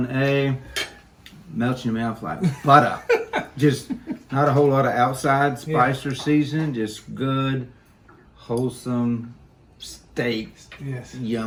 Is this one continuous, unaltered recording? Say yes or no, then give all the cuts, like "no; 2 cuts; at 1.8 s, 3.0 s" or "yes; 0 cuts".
yes; 0 cuts